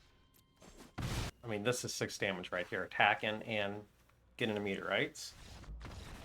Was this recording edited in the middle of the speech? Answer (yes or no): yes